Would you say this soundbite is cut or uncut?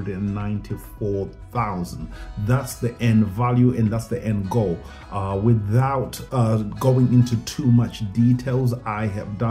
uncut